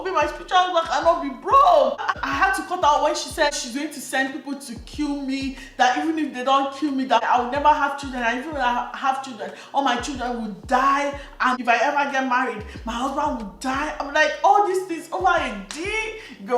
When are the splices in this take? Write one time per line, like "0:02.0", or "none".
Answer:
0:02.2
0:03.6
0:07.2
0:11.6